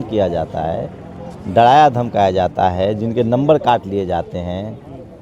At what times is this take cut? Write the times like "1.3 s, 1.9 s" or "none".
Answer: none